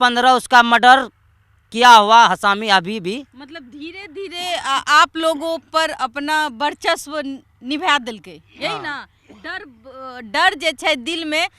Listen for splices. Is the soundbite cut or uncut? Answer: uncut